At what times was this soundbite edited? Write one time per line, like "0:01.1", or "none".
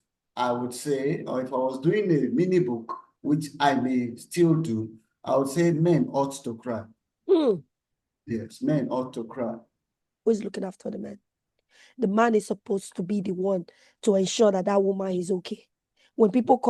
0:10.1